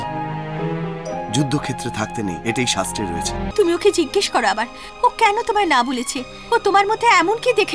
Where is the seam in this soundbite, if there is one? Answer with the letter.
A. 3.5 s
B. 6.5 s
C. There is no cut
A